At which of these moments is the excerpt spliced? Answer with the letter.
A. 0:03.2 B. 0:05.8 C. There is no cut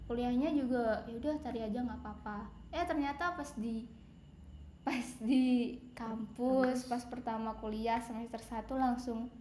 C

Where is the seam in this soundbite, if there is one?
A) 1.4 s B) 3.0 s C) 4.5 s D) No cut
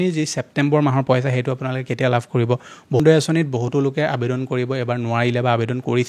B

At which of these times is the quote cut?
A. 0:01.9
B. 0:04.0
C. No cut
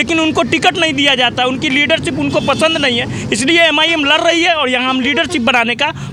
C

